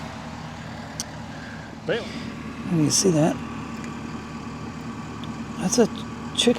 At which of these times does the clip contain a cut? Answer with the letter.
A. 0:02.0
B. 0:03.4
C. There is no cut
A